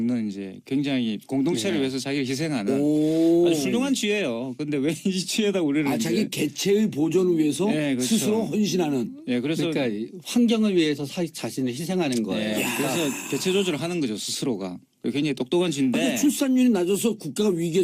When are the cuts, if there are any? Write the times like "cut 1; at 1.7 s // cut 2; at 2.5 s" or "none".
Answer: cut 1; at 2.0 s